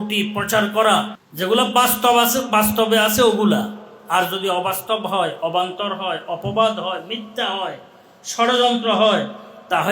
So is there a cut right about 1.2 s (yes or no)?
yes